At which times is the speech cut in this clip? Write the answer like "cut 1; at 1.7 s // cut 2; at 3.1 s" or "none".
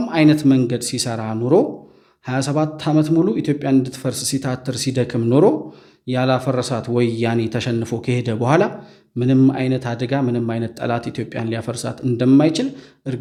none